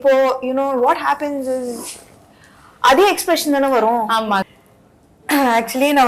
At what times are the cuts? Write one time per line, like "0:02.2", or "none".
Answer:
0:04.5